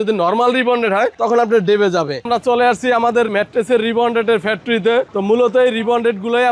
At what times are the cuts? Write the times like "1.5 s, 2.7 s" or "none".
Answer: 2.2 s, 3.3 s, 5.1 s